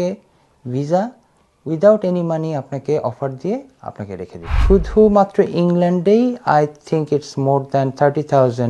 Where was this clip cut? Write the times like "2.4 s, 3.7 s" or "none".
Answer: 4.5 s